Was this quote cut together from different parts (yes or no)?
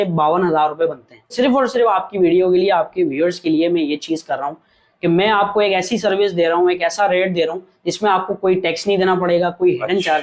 yes